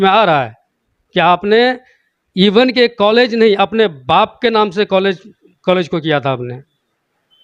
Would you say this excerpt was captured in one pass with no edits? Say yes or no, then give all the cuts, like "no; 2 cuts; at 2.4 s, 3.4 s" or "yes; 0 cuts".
yes; 0 cuts